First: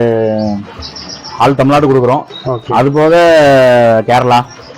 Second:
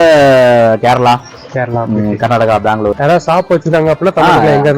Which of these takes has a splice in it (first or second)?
second